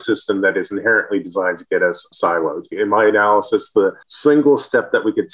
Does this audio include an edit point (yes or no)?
yes